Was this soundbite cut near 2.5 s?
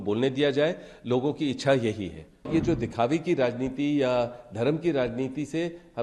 yes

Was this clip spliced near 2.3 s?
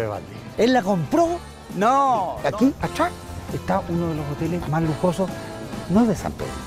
yes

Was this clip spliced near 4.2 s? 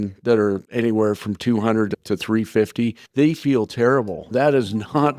yes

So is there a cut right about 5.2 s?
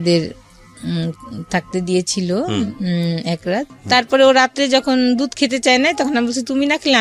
no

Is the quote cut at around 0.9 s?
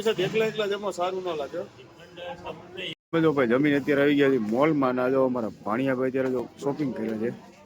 no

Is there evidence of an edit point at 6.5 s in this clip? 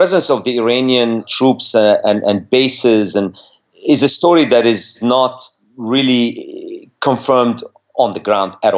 no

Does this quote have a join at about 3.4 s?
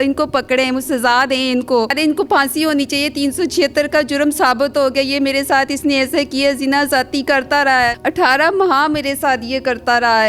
no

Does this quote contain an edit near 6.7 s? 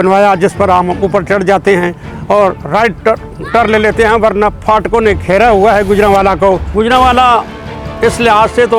yes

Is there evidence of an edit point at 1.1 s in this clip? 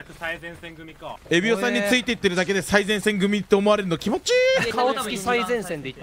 yes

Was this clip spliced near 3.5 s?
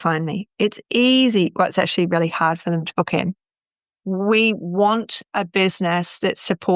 no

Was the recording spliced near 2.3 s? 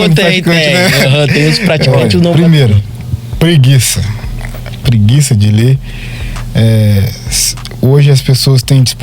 yes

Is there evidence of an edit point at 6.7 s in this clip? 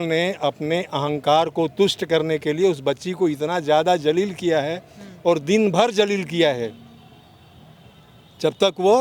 no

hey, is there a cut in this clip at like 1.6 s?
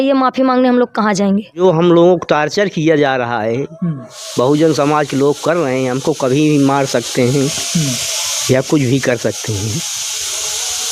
yes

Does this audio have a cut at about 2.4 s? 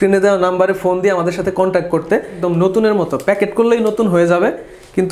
yes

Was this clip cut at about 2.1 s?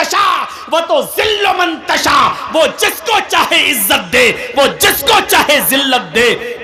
no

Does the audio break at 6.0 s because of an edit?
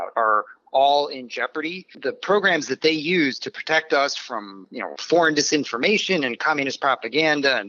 no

